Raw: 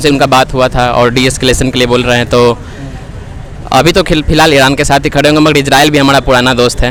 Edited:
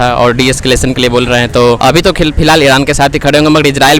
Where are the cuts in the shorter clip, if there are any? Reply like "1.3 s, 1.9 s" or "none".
1.8 s